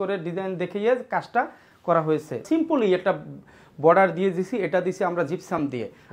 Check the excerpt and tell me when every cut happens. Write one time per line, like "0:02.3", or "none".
0:02.4

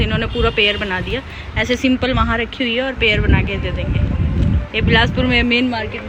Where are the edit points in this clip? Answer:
none

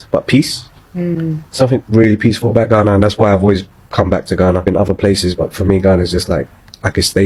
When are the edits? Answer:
none

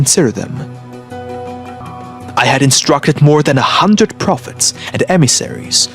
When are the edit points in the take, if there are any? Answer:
0:01.8

